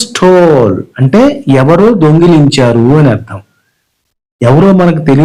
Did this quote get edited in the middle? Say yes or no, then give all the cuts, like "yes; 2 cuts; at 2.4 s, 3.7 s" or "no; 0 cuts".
no; 0 cuts